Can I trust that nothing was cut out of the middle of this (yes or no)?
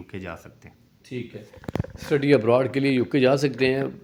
yes